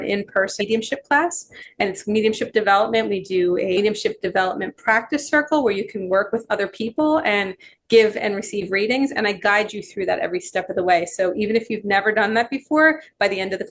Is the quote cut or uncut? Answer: cut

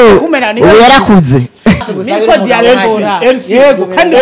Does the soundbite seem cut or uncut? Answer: cut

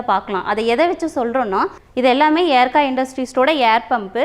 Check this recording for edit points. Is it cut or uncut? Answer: cut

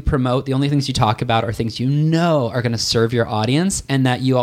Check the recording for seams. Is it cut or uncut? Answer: uncut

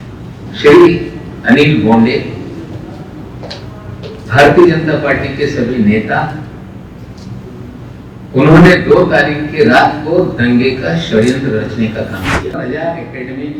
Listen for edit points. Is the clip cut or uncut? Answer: cut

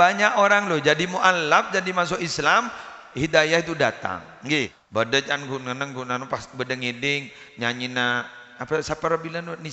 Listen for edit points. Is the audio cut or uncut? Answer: cut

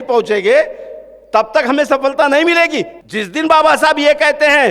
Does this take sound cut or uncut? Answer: cut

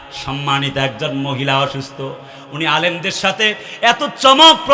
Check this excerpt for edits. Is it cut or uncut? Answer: uncut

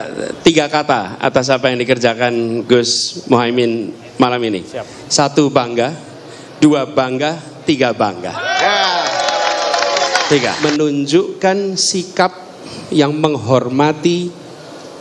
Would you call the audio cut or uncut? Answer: cut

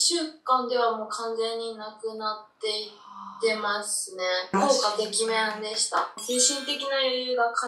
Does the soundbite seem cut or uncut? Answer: cut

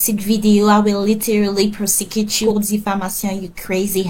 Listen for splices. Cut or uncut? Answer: uncut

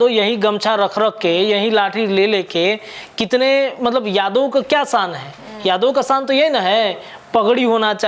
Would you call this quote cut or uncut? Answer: uncut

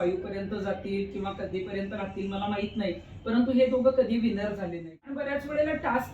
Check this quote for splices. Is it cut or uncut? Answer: cut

